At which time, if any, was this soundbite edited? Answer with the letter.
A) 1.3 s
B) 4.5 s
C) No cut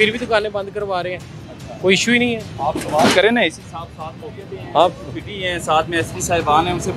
C